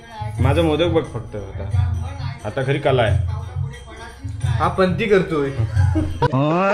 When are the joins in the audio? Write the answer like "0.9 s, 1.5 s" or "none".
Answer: none